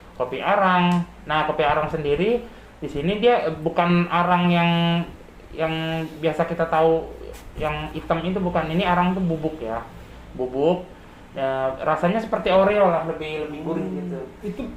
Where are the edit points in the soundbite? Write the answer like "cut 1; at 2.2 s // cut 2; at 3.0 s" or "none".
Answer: none